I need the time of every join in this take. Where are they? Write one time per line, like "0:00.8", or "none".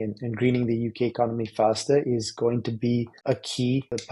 0:03.1